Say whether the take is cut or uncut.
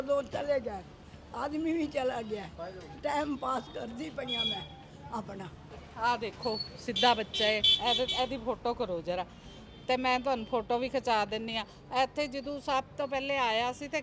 cut